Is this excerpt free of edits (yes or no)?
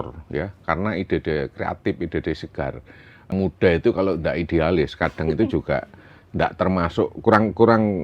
no